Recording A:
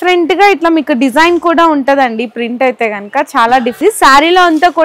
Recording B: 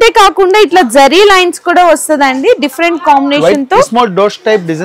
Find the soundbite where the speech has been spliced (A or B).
A